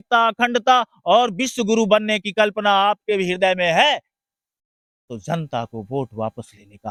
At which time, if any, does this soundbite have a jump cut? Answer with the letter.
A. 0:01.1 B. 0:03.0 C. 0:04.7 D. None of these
D